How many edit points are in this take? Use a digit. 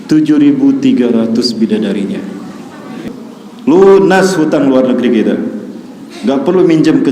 1